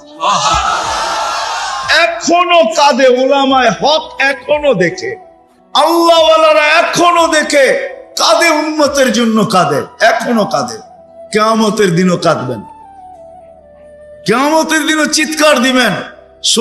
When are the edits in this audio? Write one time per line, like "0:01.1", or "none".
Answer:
0:12.6
0:14.2